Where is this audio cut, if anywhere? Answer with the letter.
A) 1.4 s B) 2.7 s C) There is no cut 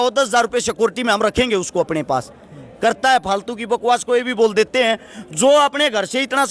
C